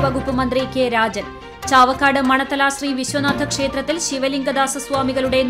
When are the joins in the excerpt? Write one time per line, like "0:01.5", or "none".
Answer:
none